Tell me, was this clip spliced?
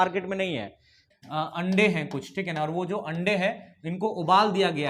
yes; 1 cut; at 1.0 s

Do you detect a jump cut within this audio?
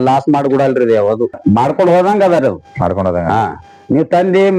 yes; 1 cut; at 1.4 s

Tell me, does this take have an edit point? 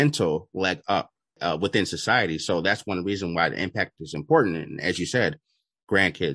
yes; 1 cut; at 1.2 s

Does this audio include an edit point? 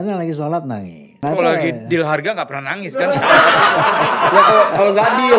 yes; 1 cut; at 1.0 s

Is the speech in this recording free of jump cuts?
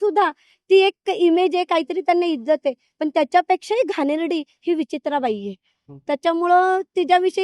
yes; 0 cuts

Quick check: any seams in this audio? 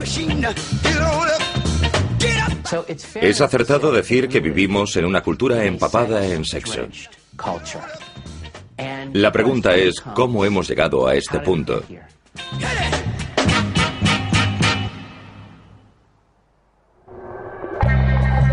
no; 0 cuts

